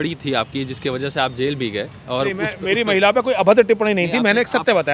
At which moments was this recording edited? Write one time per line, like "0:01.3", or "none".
none

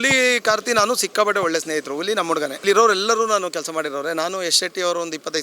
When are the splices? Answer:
0:02.6

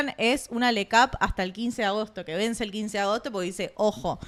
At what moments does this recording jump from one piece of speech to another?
none

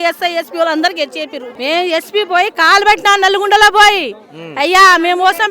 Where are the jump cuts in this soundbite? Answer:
0:01.5

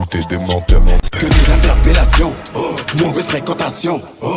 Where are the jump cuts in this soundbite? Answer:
0:01.0

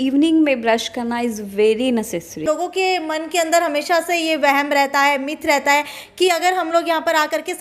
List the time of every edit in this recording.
0:02.4

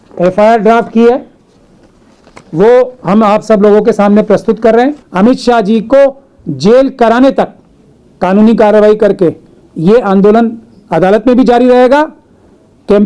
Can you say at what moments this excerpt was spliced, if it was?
0:05.0

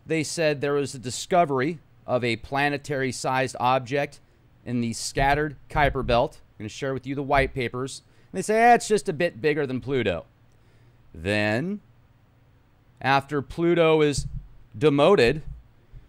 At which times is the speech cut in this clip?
0:06.8

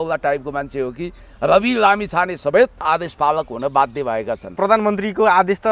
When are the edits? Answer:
0:02.8
0:04.5

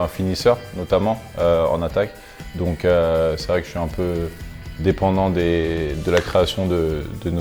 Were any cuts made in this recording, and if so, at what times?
none

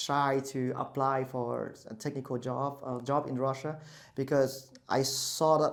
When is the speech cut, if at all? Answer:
none

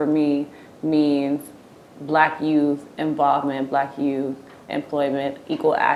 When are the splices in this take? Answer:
none

